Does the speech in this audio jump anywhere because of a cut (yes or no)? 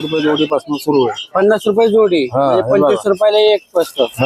no